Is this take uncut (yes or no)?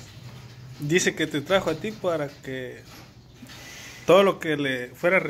yes